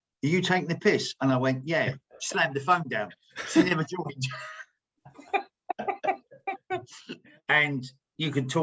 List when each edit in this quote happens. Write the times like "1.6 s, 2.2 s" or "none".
6.9 s